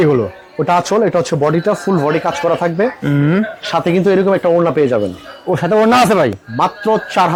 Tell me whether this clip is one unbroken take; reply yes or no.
yes